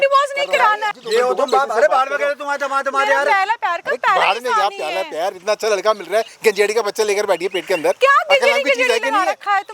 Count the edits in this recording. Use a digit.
1